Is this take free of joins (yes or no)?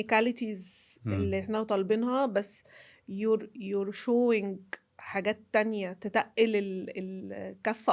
yes